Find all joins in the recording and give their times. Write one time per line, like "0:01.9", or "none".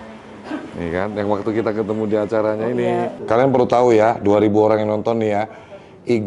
0:03.2